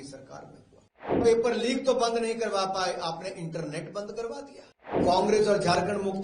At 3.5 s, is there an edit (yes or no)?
no